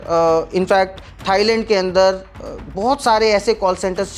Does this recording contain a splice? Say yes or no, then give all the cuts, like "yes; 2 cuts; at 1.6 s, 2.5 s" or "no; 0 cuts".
no; 0 cuts